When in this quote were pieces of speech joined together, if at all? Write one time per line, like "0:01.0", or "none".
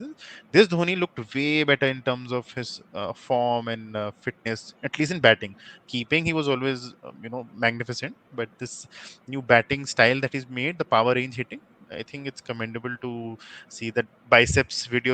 none